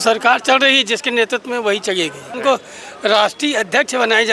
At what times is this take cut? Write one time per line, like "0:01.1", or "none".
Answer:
0:02.4